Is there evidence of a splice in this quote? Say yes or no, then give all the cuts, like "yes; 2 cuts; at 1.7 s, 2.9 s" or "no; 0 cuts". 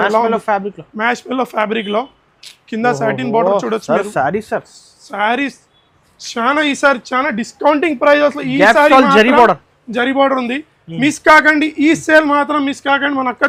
no; 0 cuts